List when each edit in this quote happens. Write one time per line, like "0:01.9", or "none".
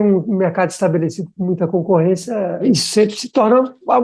0:02.6